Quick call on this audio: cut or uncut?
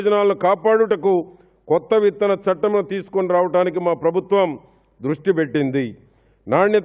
uncut